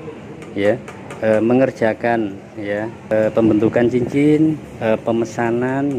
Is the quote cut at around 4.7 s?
yes; 2 cuts; at 3.1 s, 4.7 s

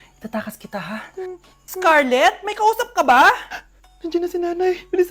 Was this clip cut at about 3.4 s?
no; 1 cut; at 1.8 s

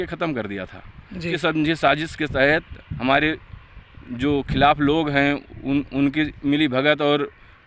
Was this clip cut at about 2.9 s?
no; 1 cut; at 1.3 s

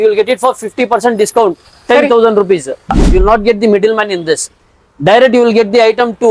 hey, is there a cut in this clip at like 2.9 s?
yes; 1 cut; at 2.9 s

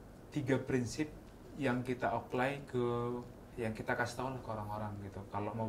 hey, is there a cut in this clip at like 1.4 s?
no; 1 cut; at 3.5 s

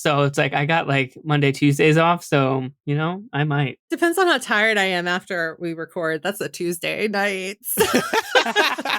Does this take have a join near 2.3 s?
no; 1 cut; at 3.9 s

